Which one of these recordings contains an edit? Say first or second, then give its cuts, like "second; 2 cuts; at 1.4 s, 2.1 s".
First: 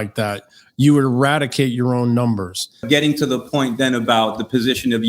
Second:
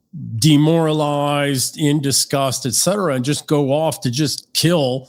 first; 1 cut; at 2.8 s